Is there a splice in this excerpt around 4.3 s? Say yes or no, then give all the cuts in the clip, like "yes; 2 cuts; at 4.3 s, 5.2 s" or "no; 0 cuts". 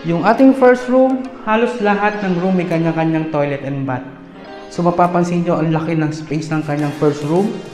no; 0 cuts